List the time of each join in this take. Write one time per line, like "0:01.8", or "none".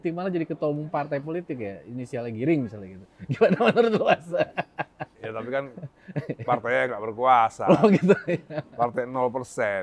none